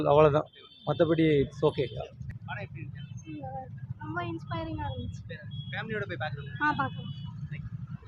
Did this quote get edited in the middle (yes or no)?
yes